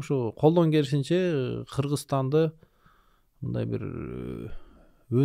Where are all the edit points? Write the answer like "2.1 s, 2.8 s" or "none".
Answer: none